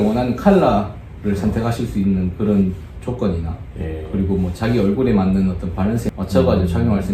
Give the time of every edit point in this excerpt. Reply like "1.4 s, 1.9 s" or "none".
6.1 s